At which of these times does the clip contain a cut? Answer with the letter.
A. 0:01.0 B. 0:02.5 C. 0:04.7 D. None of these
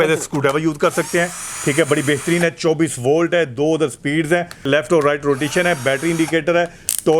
C